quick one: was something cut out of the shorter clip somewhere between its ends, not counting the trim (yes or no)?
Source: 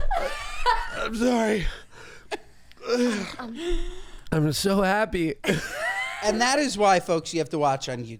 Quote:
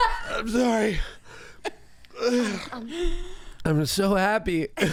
no